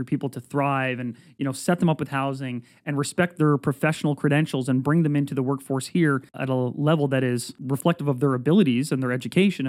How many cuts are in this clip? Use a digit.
2